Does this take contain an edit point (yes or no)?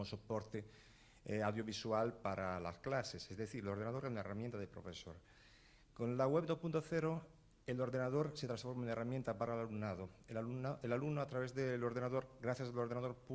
no